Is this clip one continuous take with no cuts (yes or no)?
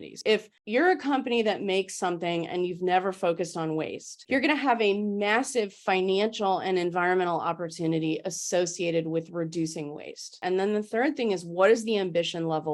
yes